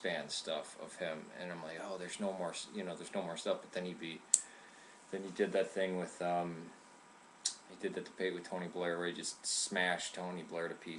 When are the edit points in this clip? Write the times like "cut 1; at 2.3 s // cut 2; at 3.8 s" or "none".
cut 1; at 5.8 s

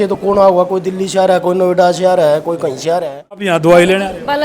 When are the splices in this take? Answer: cut 1; at 3.5 s

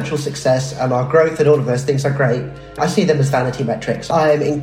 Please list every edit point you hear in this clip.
cut 1; at 2.8 s

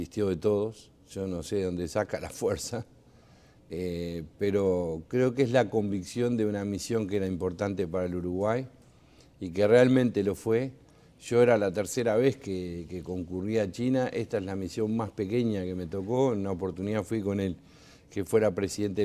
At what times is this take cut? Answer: cut 1; at 16.8 s

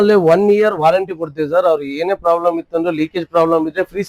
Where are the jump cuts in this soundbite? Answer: none

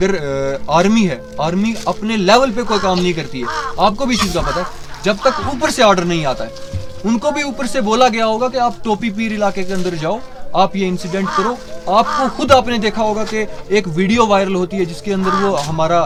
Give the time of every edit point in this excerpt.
none

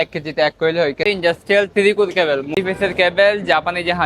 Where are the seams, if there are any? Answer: cut 1; at 1.0 s // cut 2; at 2.6 s

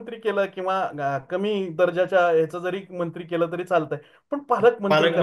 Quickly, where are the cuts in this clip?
none

